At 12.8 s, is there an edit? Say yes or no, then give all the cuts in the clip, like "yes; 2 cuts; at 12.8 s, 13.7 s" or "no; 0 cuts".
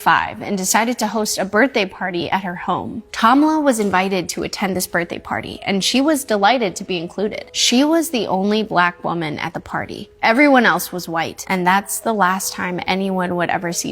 no; 3 cuts; at 3.0 s, 7.4 s, 11.4 s